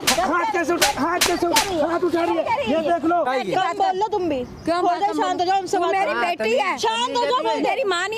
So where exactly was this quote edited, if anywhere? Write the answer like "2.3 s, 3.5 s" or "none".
3.3 s